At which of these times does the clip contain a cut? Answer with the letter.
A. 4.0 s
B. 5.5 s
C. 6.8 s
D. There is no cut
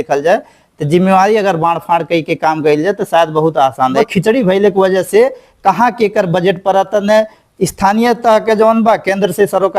A